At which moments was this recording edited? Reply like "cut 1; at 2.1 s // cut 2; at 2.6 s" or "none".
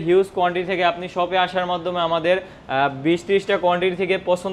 none